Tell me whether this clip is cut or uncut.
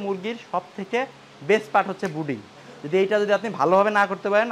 uncut